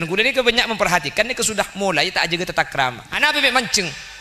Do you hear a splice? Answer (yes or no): yes